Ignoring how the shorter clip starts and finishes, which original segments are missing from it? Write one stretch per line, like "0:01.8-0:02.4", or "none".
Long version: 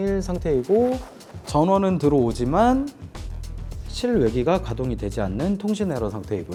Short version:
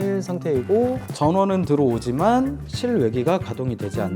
0:01.1-0:01.4
0:03.0-0:03.9